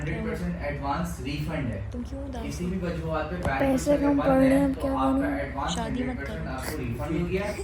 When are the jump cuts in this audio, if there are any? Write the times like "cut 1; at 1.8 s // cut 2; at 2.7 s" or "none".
none